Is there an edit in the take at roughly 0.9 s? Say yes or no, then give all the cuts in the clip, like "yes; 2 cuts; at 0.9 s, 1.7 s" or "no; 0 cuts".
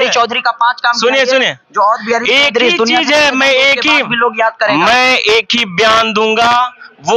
no; 0 cuts